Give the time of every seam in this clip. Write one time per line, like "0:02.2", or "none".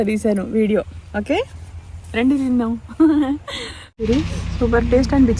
0:04.1